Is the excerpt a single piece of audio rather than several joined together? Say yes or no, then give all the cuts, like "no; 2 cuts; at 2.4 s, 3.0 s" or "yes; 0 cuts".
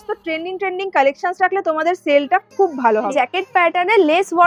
no; 1 cut; at 3.1 s